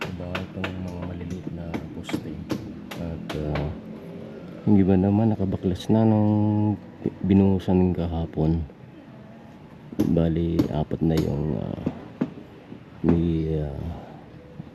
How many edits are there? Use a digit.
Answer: 0